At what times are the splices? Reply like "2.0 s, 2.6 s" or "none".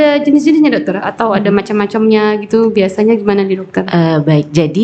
none